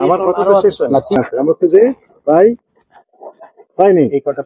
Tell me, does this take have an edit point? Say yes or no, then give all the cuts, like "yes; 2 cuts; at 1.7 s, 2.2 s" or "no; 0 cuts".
yes; 1 cut; at 1.2 s